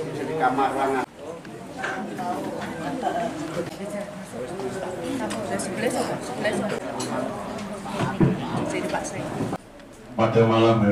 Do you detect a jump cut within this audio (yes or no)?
yes